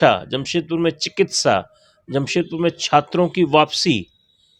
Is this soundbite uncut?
yes; 0 cuts

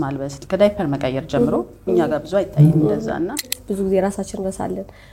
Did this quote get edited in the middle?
yes; 1 cut; at 3.6 s

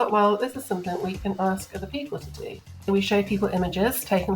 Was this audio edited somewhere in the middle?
yes; 1 cut; at 2.8 s

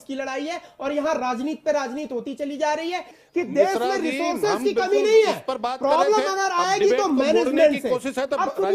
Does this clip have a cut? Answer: yes; 1 cut; at 3.2 s

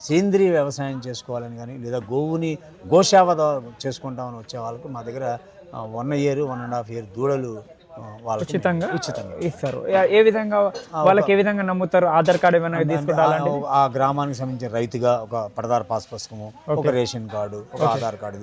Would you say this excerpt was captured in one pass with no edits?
yes; 0 cuts

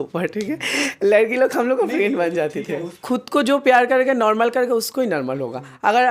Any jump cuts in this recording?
yes; 1 cut; at 3.0 s

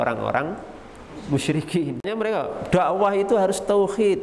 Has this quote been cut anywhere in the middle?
yes; 1 cut; at 2.1 s

